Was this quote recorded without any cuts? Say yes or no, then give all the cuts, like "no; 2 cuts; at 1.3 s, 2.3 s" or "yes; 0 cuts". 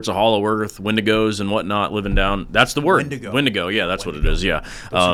yes; 0 cuts